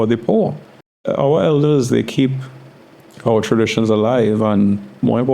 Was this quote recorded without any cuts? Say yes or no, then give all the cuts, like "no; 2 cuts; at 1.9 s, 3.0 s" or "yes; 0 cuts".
no; 1 cut; at 1.0 s